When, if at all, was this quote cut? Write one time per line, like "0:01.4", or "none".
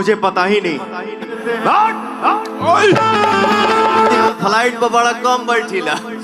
0:01.4
0:04.3